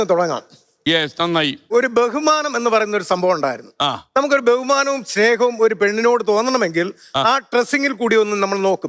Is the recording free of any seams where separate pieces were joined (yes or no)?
no